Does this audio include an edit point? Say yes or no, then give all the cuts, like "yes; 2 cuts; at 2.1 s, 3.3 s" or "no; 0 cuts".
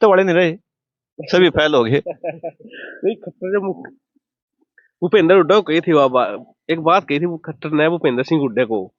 no; 0 cuts